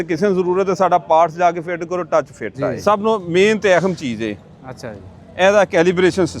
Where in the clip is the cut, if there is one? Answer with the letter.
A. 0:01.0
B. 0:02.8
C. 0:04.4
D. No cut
B